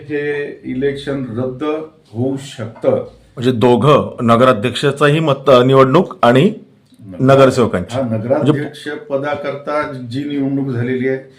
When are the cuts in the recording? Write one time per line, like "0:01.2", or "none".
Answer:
0:03.2